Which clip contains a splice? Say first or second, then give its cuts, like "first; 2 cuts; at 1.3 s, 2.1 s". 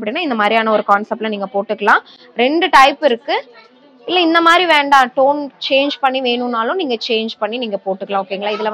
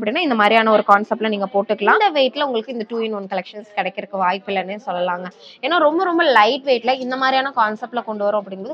second; 1 cut; at 2.0 s